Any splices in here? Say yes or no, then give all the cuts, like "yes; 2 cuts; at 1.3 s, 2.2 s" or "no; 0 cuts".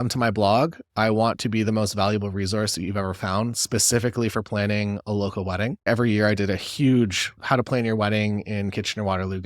yes; 2 cuts; at 5.8 s, 7.4 s